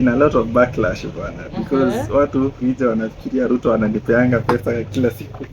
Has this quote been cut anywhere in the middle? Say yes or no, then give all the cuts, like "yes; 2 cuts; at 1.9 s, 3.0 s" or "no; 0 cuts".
no; 0 cuts